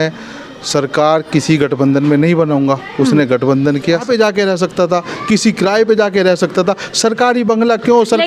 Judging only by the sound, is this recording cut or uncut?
cut